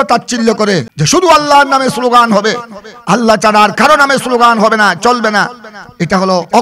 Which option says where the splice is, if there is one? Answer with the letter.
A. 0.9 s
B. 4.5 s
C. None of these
A